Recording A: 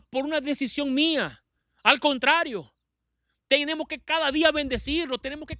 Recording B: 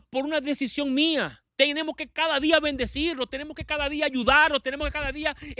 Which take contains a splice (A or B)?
B